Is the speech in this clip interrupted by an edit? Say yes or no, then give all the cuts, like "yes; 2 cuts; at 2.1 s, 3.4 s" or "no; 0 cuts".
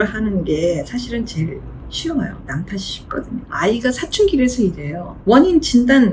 no; 0 cuts